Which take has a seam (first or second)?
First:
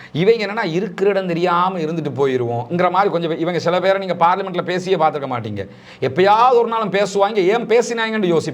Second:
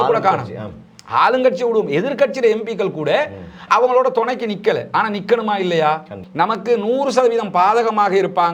second